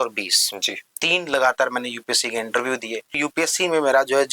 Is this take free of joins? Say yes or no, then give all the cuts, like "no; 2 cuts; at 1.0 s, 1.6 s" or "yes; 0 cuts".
no; 1 cut; at 3.2 s